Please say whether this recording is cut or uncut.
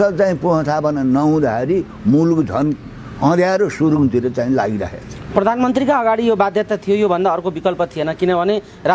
uncut